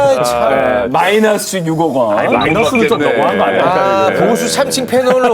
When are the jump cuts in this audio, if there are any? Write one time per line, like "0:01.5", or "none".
none